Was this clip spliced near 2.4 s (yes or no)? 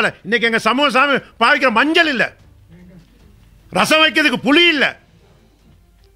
no